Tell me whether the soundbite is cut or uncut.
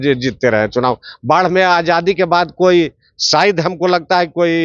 uncut